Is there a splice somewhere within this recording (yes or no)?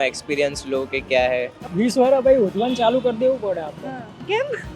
yes